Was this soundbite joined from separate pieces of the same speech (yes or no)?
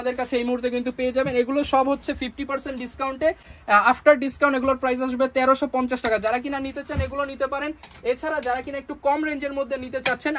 no